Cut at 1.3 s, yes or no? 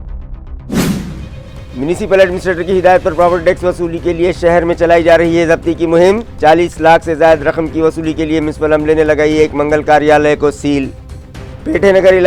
yes